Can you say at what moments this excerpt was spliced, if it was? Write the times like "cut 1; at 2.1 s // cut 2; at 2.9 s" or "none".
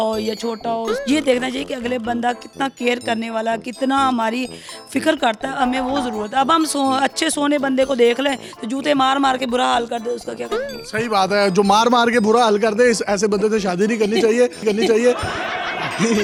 none